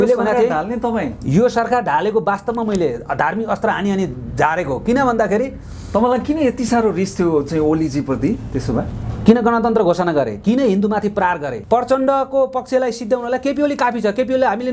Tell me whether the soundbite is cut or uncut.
cut